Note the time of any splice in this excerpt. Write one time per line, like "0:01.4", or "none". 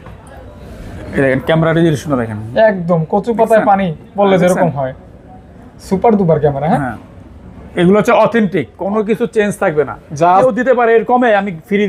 0:10.4